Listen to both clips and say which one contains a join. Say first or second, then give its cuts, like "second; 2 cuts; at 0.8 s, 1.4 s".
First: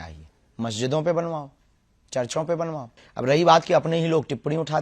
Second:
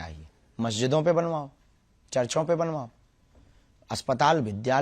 first; 1 cut; at 3.0 s